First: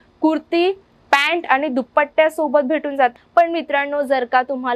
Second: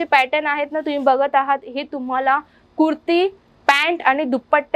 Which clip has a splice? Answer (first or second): first